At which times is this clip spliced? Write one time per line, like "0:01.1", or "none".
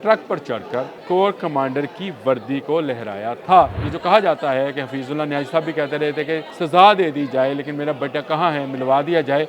0:01.0
0:03.9
0:06.5